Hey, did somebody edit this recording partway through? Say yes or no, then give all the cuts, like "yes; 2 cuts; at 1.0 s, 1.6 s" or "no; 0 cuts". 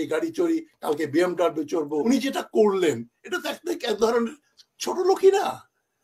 yes; 1 cut; at 2.1 s